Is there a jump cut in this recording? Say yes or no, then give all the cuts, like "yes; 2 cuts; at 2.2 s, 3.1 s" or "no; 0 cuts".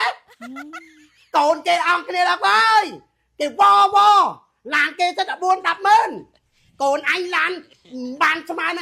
no; 0 cuts